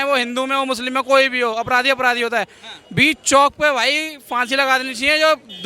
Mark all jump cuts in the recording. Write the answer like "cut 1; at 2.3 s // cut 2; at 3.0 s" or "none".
none